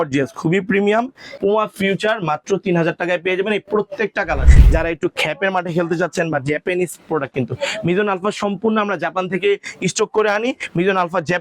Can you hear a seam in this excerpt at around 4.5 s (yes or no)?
yes